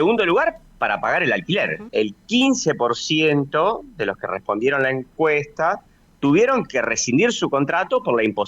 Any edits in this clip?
yes; 1 cut; at 1.9 s

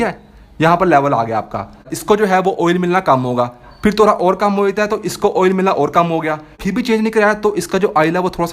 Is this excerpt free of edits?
no; 2 cuts; at 1.9 s, 6.6 s

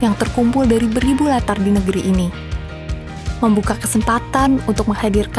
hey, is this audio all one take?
yes; 0 cuts

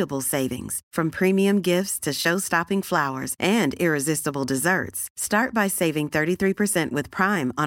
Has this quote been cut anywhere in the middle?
no; 0 cuts

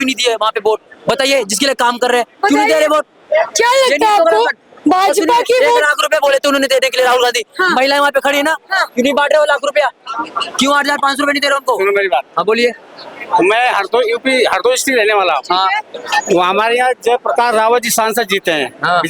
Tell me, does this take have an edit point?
no; 0 cuts

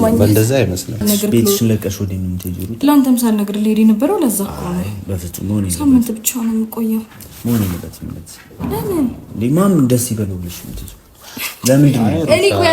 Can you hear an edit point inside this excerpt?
yes; 1 cut; at 1.0 s

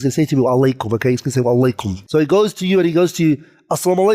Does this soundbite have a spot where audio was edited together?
yes; 1 cut; at 1.9 s

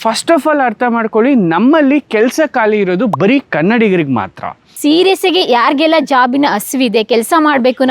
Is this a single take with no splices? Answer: no; 1 cut; at 4.8 s

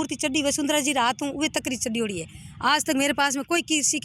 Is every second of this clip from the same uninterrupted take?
yes; 0 cuts

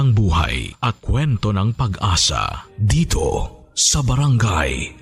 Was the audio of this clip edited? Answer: no; 0 cuts

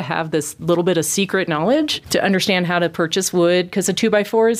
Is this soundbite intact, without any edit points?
no; 1 cut; at 2.0 s

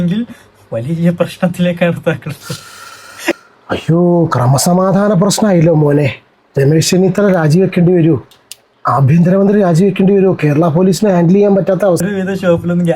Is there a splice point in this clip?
yes; 1 cut; at 12.0 s

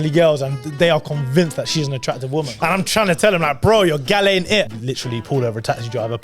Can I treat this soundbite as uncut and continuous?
no; 2 cuts; at 2.5 s, 4.7 s

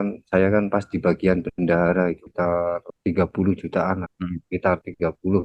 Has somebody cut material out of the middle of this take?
no; 0 cuts

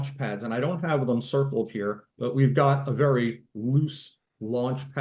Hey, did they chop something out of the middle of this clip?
no; 0 cuts

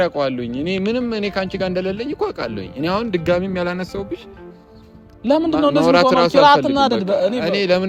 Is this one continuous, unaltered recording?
yes; 0 cuts

